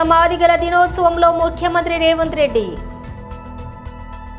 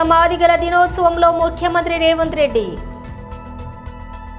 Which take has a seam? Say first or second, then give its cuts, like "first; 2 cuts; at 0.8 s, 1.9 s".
first; 1 cut; at 3.1 s